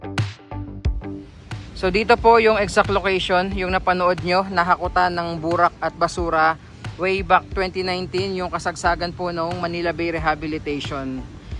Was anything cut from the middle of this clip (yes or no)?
yes